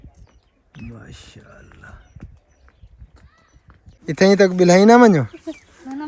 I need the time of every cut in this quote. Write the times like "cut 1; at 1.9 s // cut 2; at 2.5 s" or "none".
cut 1; at 4.0 s